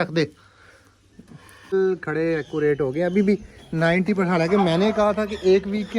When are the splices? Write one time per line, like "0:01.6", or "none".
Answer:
0:01.7